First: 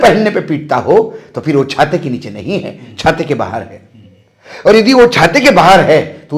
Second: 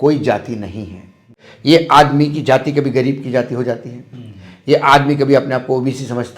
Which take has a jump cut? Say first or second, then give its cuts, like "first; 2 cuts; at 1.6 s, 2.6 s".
second; 1 cut; at 1.4 s